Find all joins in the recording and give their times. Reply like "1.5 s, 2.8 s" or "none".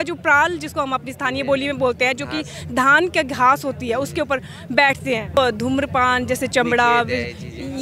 5.4 s